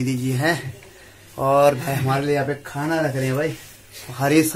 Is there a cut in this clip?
no; 0 cuts

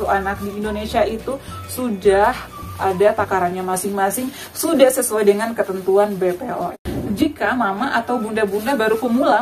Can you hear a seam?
yes; 1 cut; at 6.8 s

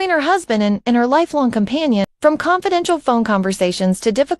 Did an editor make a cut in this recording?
yes; 1 cut; at 2.1 s

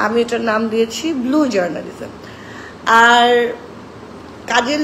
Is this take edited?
no; 0 cuts

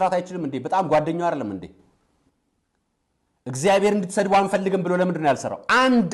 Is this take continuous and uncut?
yes; 0 cuts

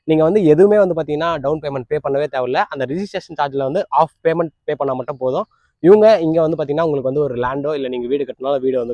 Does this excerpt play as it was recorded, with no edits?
yes; 0 cuts

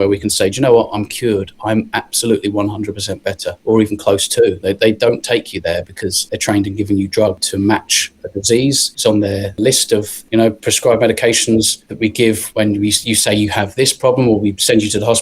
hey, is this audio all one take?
no; 2 cuts; at 7.4 s, 9.6 s

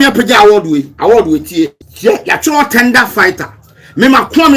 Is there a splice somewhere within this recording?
yes; 1 cut; at 1.8 s

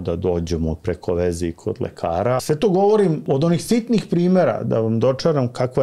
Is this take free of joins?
no; 2 cuts; at 2.4 s, 3.2 s

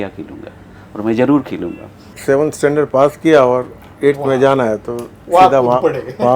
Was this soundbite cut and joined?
yes; 1 cut; at 2.1 s

